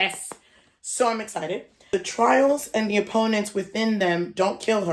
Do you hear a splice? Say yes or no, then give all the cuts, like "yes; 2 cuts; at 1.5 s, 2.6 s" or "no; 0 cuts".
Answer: no; 0 cuts